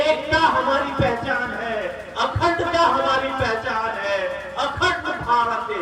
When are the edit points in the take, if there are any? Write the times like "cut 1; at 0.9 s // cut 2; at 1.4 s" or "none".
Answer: none